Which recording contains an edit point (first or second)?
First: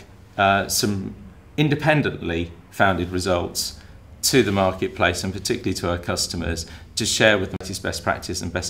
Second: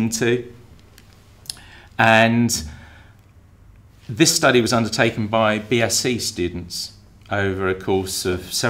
first